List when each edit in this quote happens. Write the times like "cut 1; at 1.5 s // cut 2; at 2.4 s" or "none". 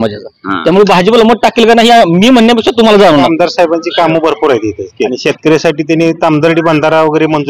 cut 1; at 3.3 s // cut 2; at 5.1 s